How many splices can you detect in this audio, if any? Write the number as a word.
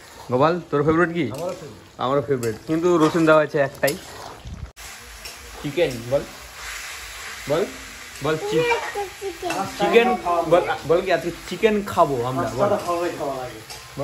one